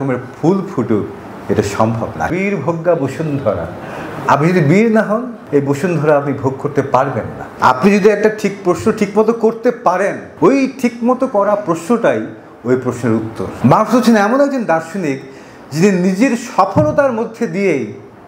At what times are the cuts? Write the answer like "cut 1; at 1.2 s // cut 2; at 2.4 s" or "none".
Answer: cut 1; at 2.3 s // cut 2; at 5.3 s // cut 3; at 7.4 s // cut 4; at 10.3 s // cut 5; at 13.5 s